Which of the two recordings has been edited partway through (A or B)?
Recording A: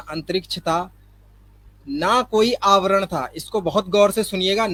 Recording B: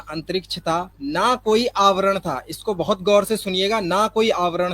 B